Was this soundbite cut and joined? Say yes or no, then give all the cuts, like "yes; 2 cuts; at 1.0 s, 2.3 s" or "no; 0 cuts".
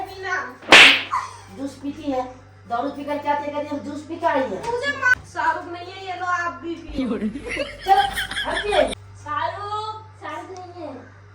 yes; 2 cuts; at 5.1 s, 9.0 s